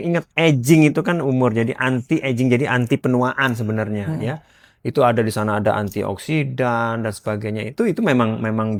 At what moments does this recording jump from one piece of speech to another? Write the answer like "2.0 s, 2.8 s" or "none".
none